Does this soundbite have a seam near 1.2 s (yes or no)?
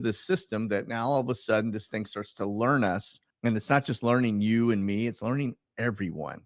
no